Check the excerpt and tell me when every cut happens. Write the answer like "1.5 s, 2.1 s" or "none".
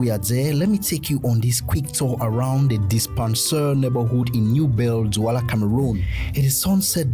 none